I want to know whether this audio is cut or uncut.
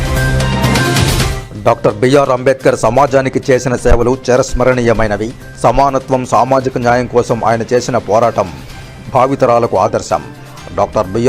cut